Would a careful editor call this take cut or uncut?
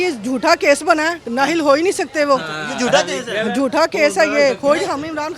uncut